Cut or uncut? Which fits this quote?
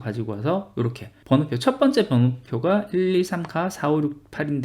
cut